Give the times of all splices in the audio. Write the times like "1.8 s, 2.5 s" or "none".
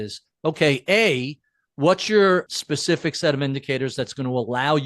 2.5 s